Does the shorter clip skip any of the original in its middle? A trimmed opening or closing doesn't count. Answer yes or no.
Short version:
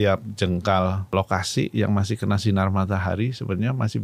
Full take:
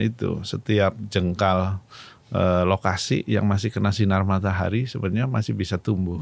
yes